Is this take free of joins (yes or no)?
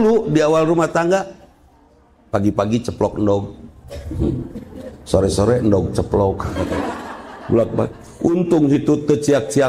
yes